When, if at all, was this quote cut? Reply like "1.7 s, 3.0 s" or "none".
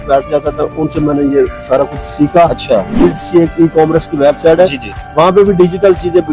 2.9 s